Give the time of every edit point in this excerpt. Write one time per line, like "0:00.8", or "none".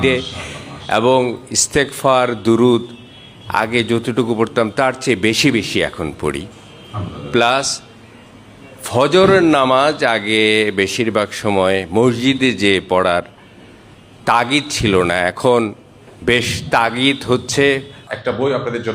0:18.0